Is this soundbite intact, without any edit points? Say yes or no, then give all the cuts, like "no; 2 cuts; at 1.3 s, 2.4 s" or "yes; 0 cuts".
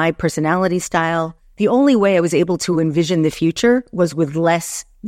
no; 1 cut; at 1.4 s